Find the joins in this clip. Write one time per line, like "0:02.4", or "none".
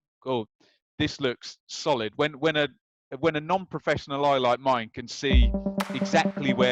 none